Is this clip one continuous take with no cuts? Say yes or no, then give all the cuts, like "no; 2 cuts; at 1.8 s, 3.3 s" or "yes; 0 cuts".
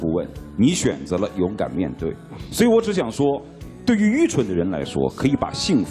yes; 0 cuts